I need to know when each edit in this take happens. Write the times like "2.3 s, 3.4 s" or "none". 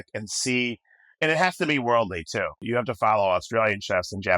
2.6 s